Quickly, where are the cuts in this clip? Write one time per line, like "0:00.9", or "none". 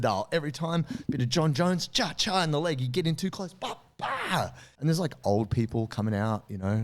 0:04.6